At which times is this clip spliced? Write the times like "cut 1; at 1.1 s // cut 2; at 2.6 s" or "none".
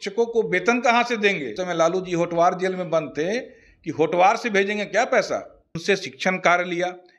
cut 1; at 1.6 s // cut 2; at 5.6 s